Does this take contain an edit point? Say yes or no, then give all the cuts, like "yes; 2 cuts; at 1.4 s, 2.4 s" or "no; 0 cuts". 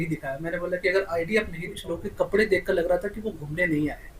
yes; 1 cut; at 1.9 s